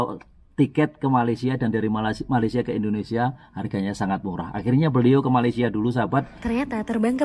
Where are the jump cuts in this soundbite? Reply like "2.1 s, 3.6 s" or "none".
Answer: 6.3 s